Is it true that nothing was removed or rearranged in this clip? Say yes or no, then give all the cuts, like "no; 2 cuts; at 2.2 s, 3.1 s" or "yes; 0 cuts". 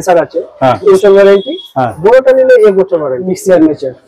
no; 2 cuts; at 0.9 s, 3.3 s